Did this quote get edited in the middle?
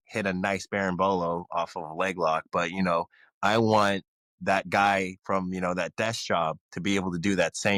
no; 0 cuts

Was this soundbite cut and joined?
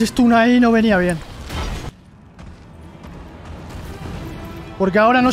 yes; 1 cut; at 1.9 s

